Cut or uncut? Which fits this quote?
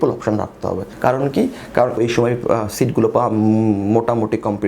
cut